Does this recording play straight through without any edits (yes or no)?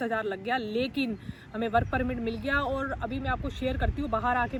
yes